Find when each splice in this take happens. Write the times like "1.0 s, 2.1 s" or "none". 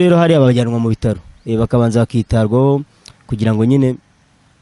none